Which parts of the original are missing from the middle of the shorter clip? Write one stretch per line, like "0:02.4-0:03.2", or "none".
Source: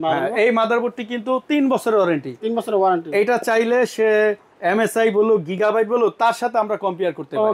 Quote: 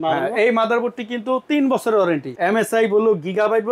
0:02.3-0:04.5